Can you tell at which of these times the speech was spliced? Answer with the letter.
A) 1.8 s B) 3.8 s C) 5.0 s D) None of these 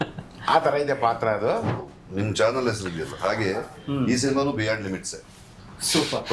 A